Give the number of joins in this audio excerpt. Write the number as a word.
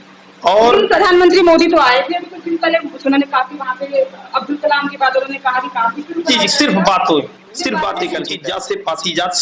one